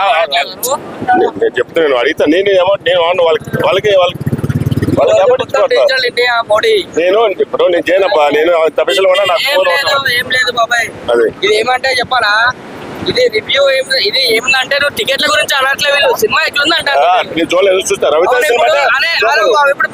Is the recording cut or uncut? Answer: uncut